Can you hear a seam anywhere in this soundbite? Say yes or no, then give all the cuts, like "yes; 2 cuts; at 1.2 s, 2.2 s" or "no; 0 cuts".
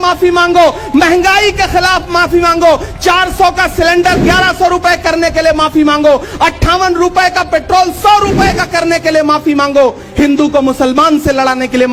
no; 0 cuts